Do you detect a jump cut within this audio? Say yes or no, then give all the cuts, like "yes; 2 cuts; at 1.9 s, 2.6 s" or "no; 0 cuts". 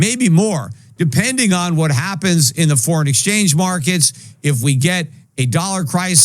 no; 0 cuts